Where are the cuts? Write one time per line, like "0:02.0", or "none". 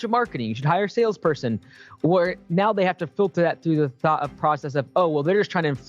none